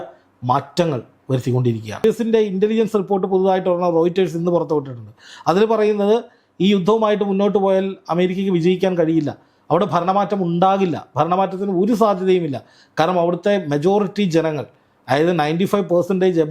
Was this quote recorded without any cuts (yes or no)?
no